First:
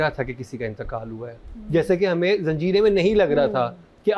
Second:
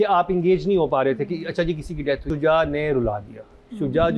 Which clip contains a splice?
second; 1 cut; at 2.2 s

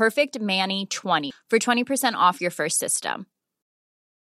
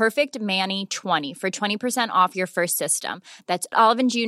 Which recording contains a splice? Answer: second; 1 cut; at 1.3 s

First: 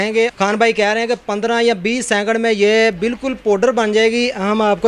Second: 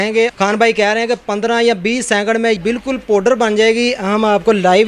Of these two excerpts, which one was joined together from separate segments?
second; 1 cut; at 2.6 s

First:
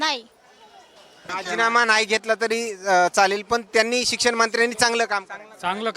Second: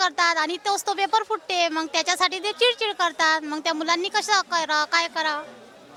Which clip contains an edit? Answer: first; 1 cut; at 1.3 s

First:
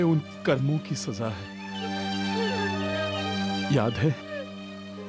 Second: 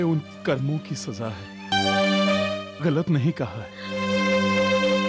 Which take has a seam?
second; 1 cut; at 1.7 s

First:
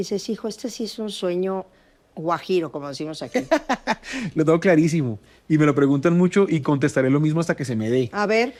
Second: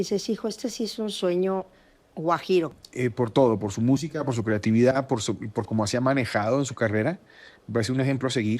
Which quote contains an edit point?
second; 1 cut; at 2.8 s

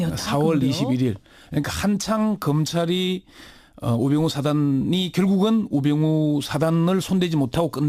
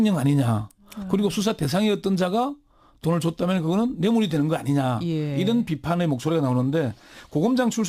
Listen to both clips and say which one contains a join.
second; 1 cut; at 2.7 s

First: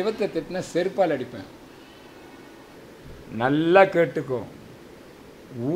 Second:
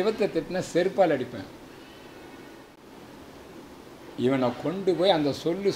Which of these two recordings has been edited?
first; 1 cut; at 2.8 s

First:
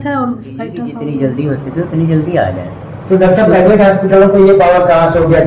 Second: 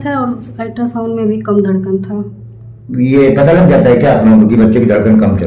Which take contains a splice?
first; 1 cut; at 0.9 s

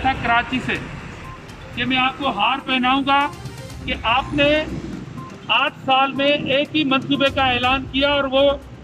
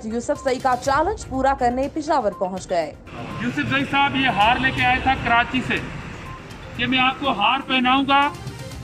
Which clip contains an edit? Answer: second; 1 cut; at 3.0 s

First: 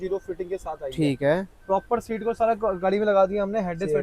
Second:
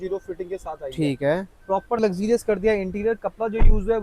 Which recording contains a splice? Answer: second; 1 cut; at 2.0 s

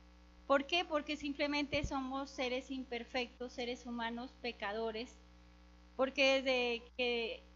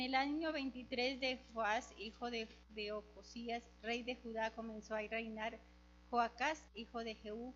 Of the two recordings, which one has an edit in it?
second; 1 cut; at 5.8 s

